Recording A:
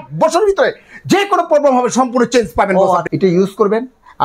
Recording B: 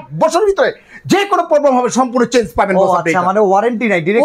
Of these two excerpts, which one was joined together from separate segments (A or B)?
A